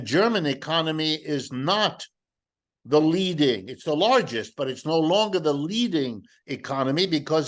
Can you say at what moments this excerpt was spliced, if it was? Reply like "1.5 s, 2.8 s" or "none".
none